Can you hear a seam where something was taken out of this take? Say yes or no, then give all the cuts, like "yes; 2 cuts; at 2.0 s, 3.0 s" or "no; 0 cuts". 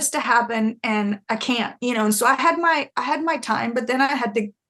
yes; 1 cut; at 1.2 s